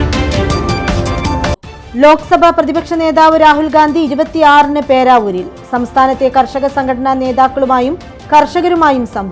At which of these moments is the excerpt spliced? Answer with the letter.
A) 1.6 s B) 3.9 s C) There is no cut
A